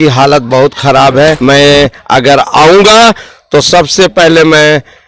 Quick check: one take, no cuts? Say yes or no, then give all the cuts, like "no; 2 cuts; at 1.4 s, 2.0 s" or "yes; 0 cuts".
no; 1 cut; at 1.4 s